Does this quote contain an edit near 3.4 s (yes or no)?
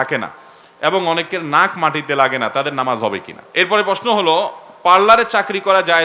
yes